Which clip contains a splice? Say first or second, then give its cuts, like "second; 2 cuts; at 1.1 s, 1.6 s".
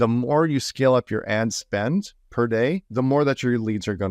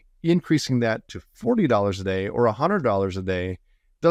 first; 1 cut; at 2.8 s